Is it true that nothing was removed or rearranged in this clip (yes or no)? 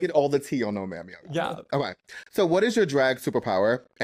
yes